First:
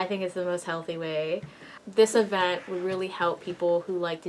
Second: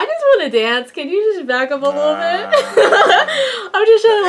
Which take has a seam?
first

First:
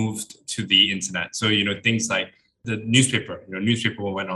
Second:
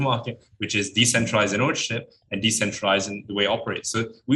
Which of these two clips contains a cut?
first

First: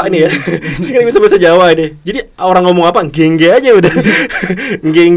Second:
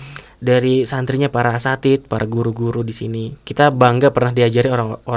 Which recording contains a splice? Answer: second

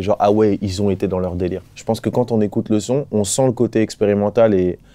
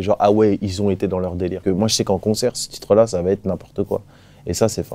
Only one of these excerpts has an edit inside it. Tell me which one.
second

